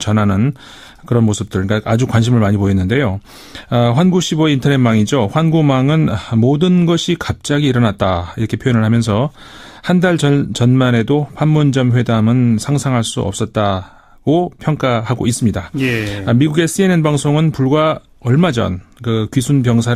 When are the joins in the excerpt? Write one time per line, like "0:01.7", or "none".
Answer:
0:09.6